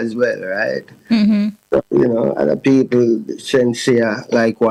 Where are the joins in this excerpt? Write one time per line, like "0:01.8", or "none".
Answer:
none